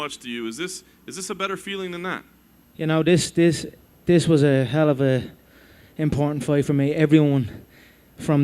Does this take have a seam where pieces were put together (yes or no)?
yes